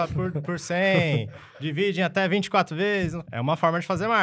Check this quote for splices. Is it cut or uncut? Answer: cut